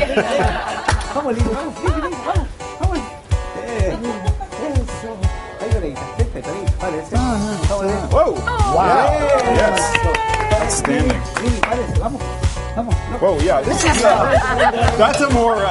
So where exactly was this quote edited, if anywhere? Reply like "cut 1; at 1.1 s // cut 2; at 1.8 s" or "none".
cut 1; at 5.0 s